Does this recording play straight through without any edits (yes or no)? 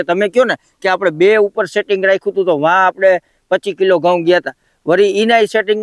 yes